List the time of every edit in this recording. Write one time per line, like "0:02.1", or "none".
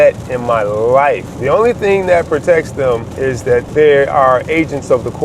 0:01.3
0:03.5